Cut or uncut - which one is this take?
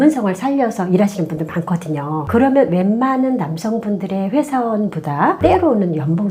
uncut